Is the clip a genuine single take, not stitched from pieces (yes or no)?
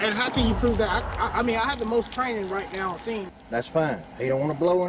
no